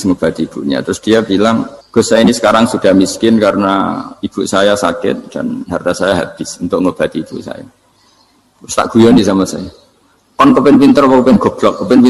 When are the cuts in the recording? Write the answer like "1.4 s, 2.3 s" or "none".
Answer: 1.8 s